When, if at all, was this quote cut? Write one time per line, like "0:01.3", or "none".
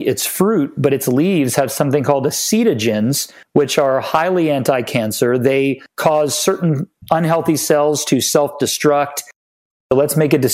0:09.5

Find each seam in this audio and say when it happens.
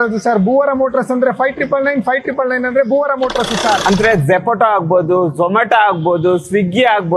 0:03.8

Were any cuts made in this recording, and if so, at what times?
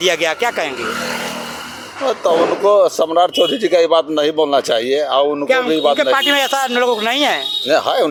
none

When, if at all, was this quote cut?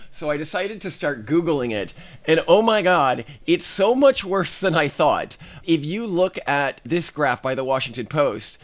none

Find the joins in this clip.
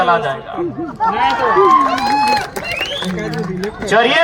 none

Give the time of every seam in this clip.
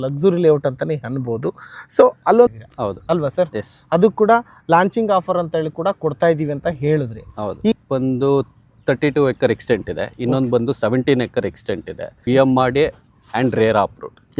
0:02.5
0:07.7
0:12.1

